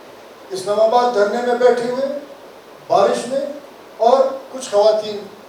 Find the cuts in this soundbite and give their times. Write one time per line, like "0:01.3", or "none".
none